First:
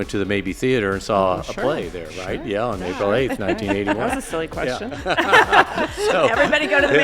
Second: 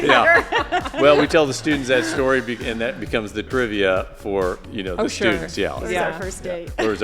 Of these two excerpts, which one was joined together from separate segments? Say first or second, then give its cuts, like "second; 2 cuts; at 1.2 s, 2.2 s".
second; 1 cut; at 3.5 s